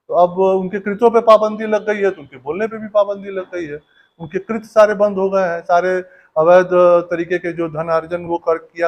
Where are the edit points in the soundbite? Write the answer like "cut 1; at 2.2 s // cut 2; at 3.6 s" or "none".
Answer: none